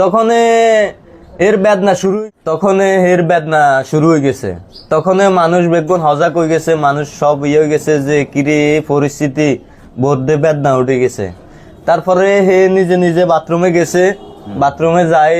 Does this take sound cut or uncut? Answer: cut